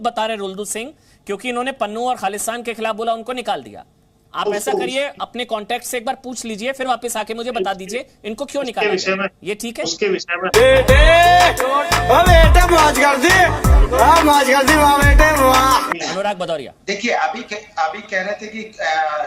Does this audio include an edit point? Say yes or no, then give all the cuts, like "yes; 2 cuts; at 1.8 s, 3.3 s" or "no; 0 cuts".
yes; 1 cut; at 15.9 s